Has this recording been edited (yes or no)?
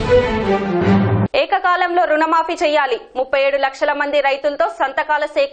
yes